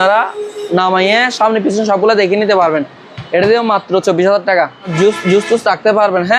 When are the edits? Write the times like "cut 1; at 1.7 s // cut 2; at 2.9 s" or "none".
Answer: cut 1; at 4.9 s